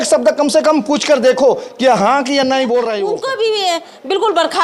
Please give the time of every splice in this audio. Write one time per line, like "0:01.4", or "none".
0:03.1